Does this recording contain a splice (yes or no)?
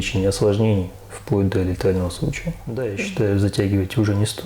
yes